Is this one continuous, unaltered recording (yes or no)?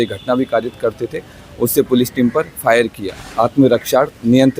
no